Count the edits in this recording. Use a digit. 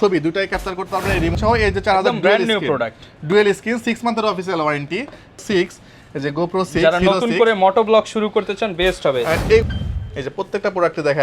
3